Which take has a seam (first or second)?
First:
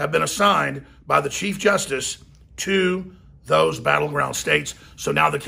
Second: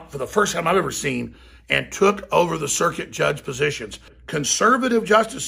second